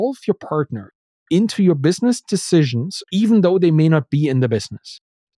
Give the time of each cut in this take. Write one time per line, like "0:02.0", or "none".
0:02.9